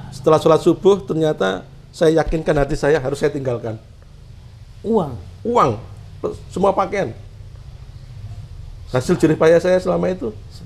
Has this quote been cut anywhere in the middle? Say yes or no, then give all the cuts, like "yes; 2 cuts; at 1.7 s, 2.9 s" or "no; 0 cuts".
no; 0 cuts